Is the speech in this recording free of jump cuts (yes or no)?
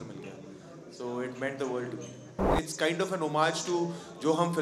no